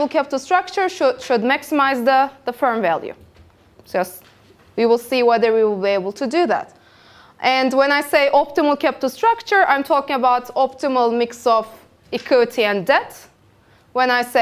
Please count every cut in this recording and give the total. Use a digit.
1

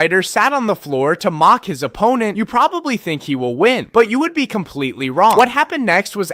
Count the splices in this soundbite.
0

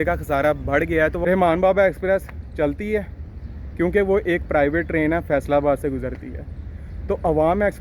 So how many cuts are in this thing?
1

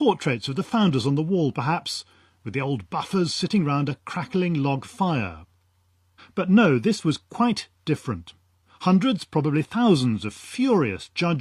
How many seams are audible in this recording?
0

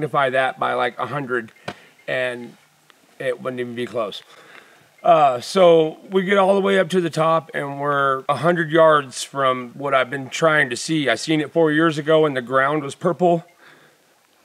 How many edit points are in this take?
0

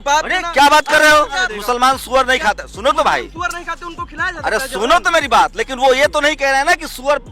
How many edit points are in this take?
1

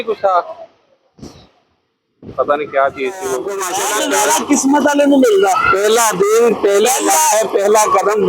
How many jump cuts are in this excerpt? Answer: 1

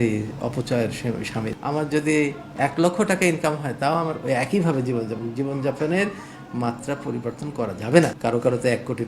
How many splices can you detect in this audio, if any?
2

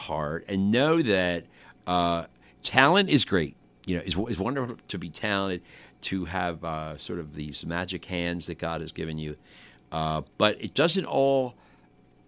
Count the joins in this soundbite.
0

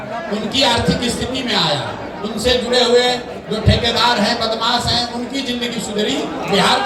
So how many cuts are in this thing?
0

